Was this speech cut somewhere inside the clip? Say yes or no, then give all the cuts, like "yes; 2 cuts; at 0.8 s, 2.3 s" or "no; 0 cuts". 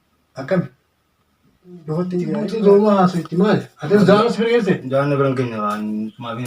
yes; 1 cut; at 2.4 s